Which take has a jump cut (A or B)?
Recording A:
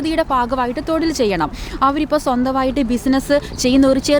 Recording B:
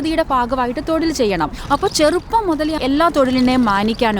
B